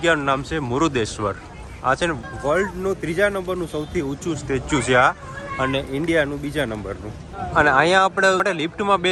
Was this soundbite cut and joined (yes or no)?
no